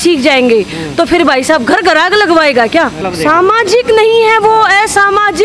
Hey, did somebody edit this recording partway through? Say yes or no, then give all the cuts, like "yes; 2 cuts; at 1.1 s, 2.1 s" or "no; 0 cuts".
yes; 1 cut; at 3.0 s